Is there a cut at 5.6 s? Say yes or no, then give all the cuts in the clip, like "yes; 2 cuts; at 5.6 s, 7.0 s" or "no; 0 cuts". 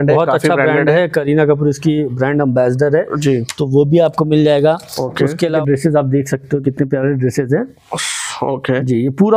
yes; 1 cut; at 5.6 s